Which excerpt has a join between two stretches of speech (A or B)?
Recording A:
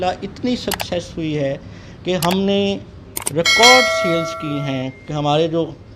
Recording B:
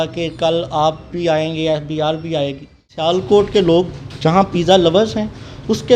B